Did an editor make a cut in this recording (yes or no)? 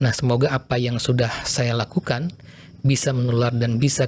no